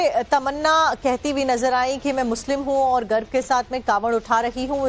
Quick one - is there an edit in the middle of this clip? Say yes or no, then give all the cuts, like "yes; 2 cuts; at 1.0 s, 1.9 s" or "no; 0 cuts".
yes; 1 cut; at 1.7 s